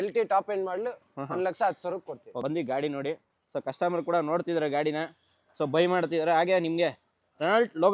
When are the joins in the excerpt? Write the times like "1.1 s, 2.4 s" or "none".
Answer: none